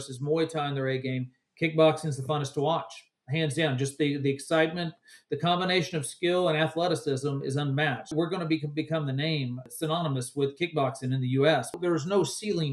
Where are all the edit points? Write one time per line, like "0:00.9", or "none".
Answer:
0:08.1
0:09.7
0:11.8